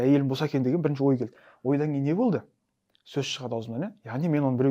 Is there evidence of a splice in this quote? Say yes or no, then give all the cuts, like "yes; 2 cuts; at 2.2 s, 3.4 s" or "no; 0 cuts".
no; 0 cuts